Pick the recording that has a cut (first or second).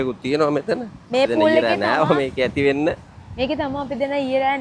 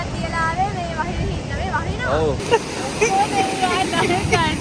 second